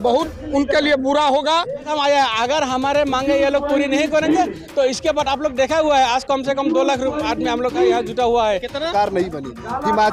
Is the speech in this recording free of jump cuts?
no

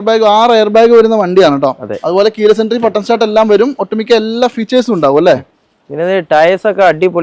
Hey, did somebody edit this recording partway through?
no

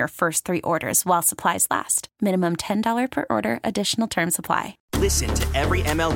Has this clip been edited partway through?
yes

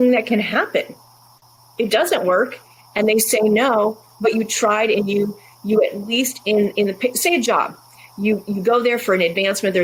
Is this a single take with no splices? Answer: yes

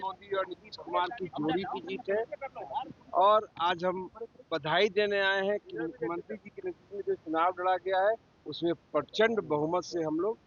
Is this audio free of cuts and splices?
yes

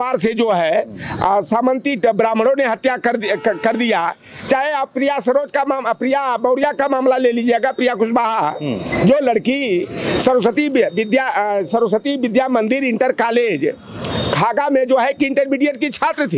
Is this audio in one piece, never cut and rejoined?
yes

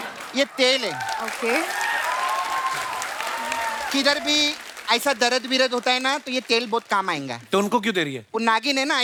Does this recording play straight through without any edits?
yes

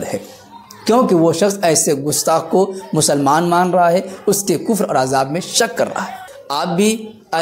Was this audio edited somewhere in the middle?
yes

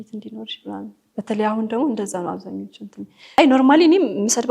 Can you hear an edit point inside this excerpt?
yes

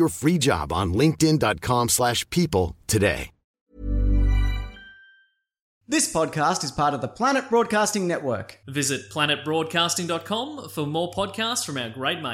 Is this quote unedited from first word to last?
no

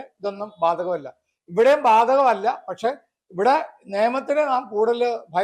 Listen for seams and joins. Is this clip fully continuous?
yes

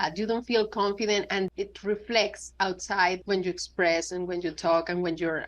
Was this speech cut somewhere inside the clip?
yes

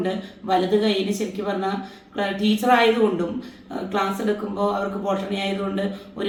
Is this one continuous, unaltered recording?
yes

